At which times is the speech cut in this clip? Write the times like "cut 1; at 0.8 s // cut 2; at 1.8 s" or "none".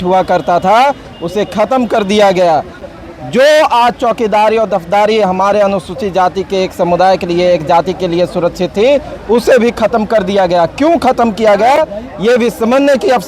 none